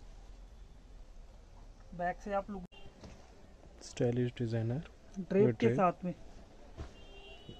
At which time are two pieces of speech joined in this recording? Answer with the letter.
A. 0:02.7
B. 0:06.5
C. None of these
A